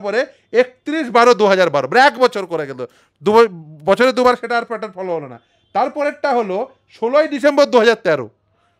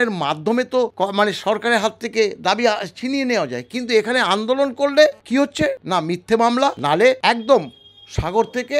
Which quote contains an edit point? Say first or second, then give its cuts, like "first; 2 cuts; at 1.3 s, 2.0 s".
second; 3 cuts; at 0.9 s, 5.7 s, 7.0 s